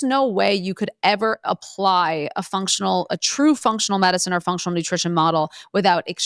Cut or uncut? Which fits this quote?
uncut